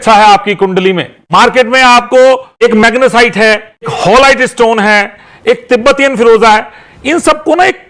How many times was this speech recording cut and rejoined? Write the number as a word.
three